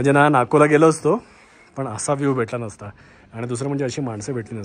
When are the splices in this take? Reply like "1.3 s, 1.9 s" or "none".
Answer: none